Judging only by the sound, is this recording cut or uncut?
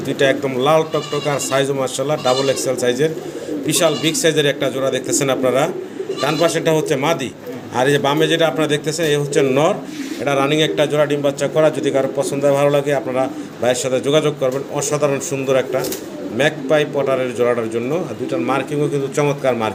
uncut